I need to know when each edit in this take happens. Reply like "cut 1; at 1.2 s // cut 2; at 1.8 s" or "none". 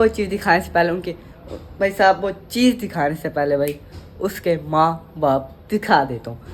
none